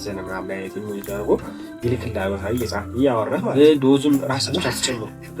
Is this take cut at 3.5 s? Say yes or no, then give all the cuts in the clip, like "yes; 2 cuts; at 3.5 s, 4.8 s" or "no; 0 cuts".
yes; 1 cut; at 3.5 s